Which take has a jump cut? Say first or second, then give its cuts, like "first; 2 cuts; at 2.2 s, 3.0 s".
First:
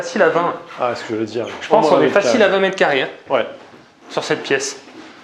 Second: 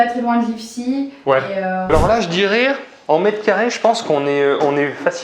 second; 1 cut; at 1.9 s